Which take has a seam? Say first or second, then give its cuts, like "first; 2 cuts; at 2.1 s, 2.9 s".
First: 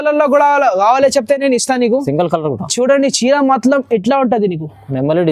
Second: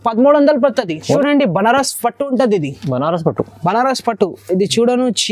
second; 1 cut; at 1.2 s